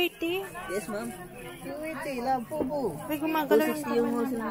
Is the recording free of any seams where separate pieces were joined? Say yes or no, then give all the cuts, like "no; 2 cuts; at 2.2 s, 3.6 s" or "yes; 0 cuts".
yes; 0 cuts